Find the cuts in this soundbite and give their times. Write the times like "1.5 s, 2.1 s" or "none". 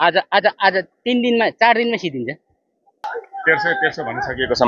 3.1 s